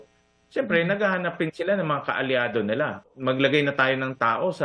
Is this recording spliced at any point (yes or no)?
yes